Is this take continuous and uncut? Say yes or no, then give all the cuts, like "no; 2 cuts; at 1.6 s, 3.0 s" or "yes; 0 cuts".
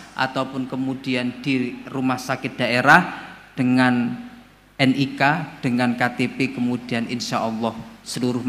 yes; 0 cuts